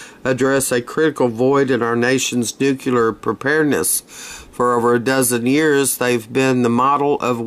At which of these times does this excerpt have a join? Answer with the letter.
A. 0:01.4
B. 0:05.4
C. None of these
A